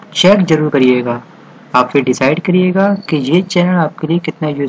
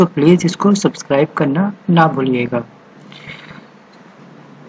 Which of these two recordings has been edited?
first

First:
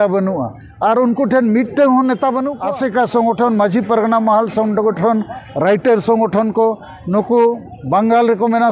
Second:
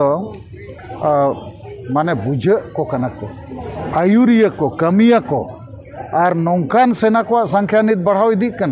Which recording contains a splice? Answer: first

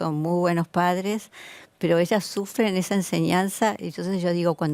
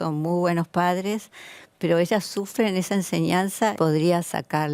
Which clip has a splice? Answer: second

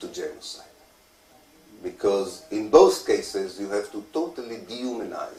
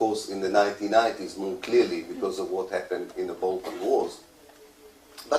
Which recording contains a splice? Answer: second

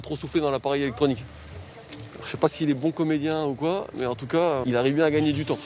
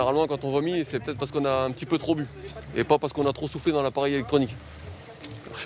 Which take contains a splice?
first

